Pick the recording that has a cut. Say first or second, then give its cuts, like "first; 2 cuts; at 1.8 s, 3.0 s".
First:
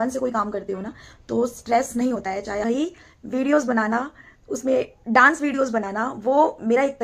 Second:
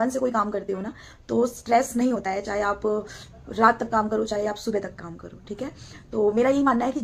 first; 1 cut; at 2.6 s